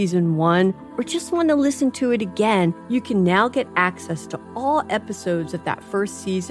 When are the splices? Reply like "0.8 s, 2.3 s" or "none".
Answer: none